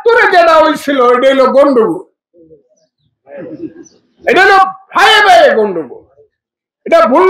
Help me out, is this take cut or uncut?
uncut